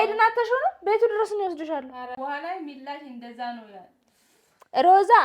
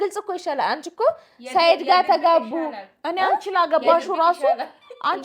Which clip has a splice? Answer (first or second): first